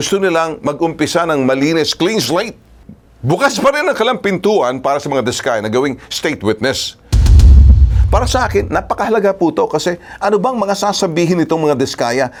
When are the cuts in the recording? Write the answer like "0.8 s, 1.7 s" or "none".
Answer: none